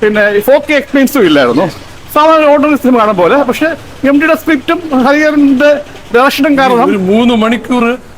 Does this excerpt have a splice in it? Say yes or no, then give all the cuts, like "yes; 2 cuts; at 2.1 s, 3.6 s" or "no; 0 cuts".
yes; 1 cut; at 6.9 s